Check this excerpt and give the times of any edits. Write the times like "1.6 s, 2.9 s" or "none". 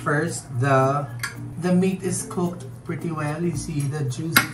none